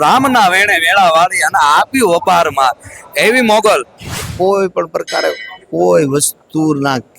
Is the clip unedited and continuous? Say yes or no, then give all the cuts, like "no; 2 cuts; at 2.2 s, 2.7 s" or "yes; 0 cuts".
no; 1 cut; at 4.2 s